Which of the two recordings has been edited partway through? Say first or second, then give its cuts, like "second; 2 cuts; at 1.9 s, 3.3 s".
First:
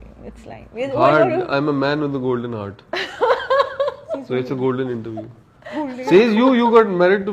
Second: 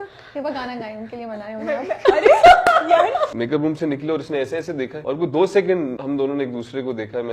second; 3 cuts; at 3.3 s, 5.0 s, 6.0 s